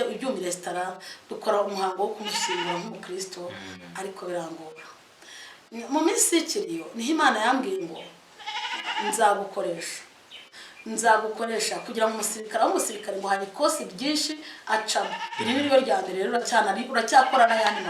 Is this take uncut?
yes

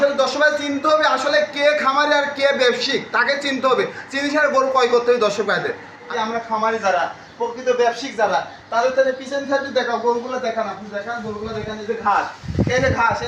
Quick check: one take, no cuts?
no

